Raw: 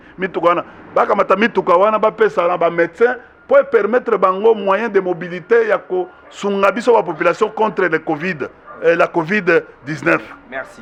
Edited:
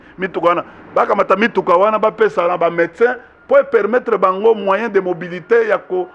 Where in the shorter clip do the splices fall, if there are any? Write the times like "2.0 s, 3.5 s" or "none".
none